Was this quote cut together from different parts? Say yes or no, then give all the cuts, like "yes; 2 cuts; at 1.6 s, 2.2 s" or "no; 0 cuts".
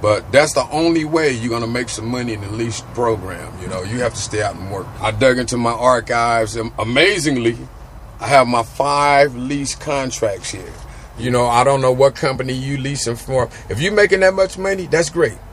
yes; 2 cuts; at 4.9 s, 11.2 s